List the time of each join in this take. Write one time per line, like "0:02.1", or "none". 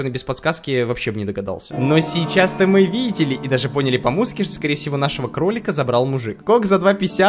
0:01.7
0:06.3